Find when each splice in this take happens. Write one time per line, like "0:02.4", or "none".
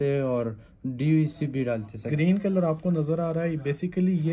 0:02.0